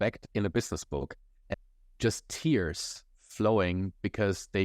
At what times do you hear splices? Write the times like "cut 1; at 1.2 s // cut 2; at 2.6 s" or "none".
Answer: cut 1; at 1.5 s